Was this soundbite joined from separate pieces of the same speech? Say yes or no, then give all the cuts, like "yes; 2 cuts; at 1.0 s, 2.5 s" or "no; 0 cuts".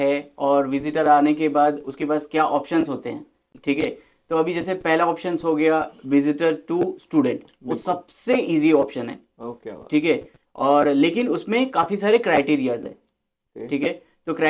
no; 0 cuts